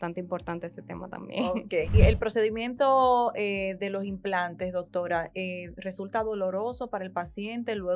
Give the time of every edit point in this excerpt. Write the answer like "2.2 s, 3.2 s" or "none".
1.9 s